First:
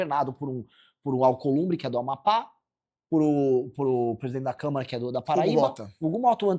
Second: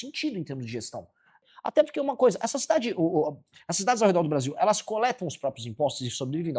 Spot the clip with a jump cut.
second; 1 cut; at 1.4 s

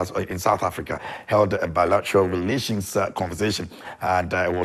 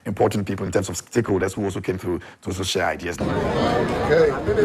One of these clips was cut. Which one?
second; 1 cut; at 3.2 s

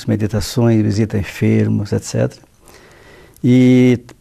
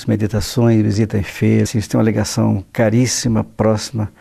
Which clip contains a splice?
first; 1 cut; at 1.7 s

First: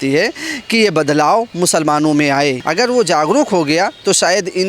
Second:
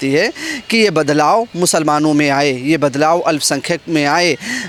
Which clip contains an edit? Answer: first; 1 cut; at 2.6 s

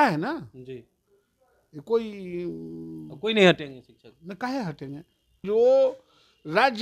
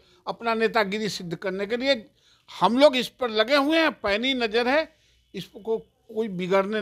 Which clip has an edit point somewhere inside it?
first; 1 cut; at 5.3 s

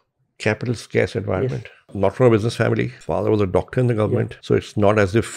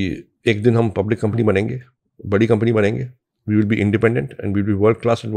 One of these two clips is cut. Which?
first; 3 cuts; at 1.9 s, 3.0 s, 4.3 s

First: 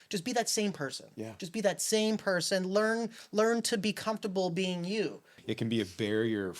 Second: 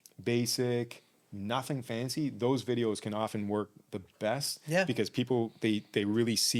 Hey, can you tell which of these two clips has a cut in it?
first; 1 cut; at 5.3 s

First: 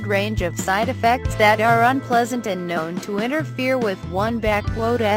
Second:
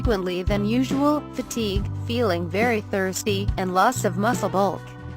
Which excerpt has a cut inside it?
second; 1 cut; at 3.2 s

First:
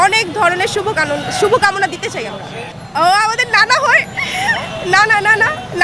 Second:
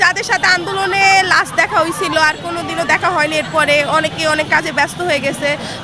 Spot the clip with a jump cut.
first; 1 cut; at 2.6 s

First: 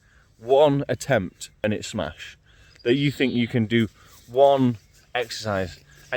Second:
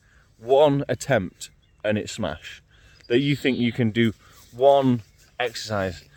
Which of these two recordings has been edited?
first; 1 cut; at 1.6 s

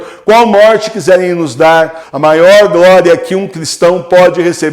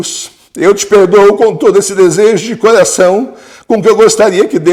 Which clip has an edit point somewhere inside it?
first; 1 cut; at 2.0 s

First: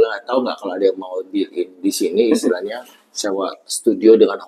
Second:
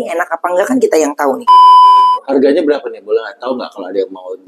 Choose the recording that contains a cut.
second; 2 cuts; at 1.4 s, 2.2 s

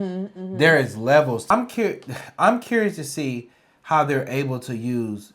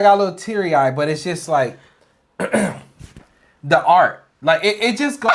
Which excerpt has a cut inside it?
first; 1 cut; at 1.4 s

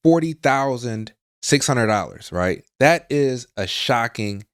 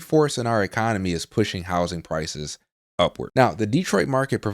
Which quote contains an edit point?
second; 1 cut; at 3.2 s

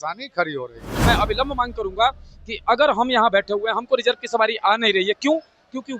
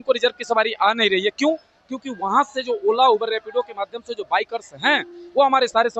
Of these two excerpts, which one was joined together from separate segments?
first; 1 cut; at 0.9 s

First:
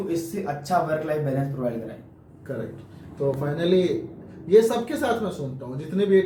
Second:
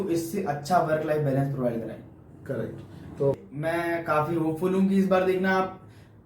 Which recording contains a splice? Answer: second; 1 cut; at 3.4 s

